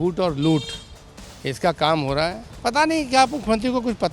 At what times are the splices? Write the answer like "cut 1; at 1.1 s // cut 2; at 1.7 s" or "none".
cut 1; at 2.5 s